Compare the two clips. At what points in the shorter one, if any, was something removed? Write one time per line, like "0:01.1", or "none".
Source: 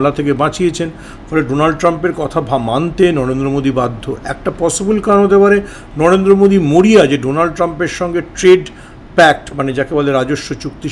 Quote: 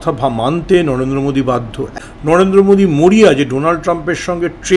0:02.1